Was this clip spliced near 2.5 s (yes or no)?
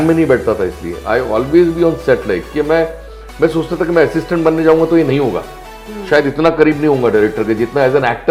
no